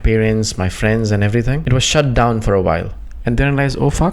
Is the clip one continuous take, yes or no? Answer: no